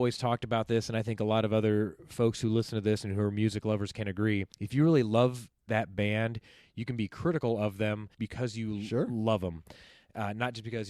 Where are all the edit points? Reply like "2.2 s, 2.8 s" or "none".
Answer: 4.6 s, 8.2 s